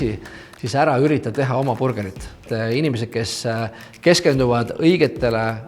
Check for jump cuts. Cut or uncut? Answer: cut